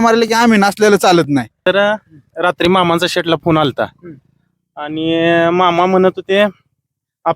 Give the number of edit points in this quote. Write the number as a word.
one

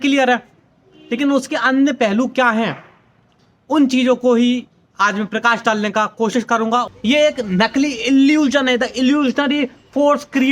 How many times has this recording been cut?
one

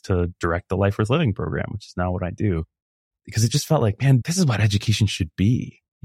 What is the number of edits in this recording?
two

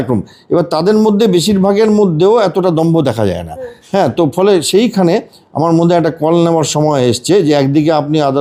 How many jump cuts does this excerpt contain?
zero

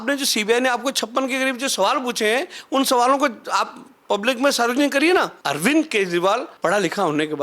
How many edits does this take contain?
two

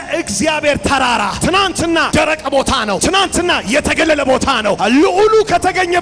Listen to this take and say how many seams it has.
three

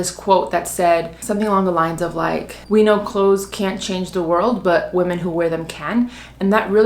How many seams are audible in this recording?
zero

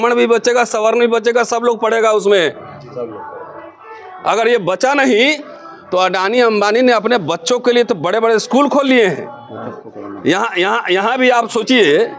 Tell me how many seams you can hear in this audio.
zero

